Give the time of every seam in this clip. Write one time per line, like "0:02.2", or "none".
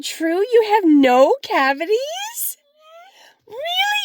none